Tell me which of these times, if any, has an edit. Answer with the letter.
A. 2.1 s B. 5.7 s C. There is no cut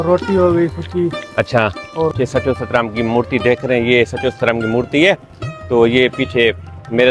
A